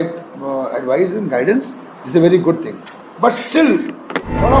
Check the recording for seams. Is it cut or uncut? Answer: uncut